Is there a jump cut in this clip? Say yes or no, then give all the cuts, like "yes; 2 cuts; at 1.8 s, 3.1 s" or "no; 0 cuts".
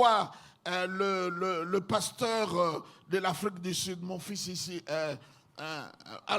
no; 0 cuts